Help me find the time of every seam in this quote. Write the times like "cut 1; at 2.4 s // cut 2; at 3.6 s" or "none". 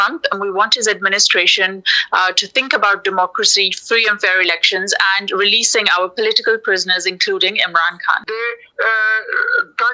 cut 1; at 8.2 s